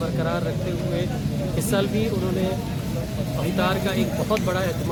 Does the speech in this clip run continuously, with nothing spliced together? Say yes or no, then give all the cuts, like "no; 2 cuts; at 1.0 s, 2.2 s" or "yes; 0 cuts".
yes; 0 cuts